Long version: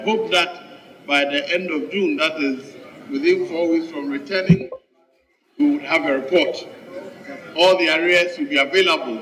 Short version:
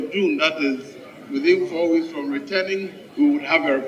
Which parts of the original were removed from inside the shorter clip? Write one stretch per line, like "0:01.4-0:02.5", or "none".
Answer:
0:04.4-0:05.0